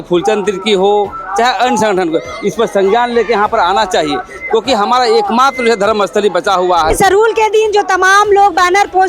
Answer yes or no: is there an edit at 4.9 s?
no